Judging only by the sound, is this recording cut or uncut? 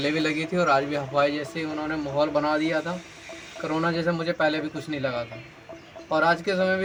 uncut